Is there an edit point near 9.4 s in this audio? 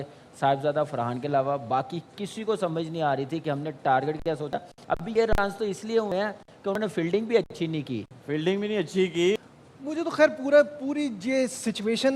yes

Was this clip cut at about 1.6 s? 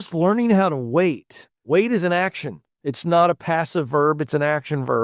yes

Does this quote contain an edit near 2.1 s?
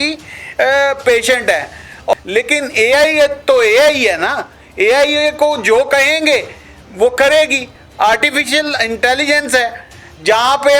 yes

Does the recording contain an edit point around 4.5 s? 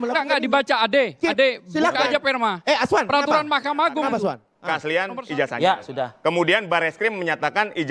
yes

